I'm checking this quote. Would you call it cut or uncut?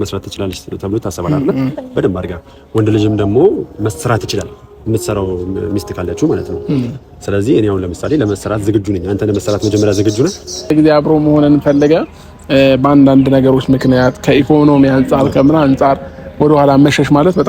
cut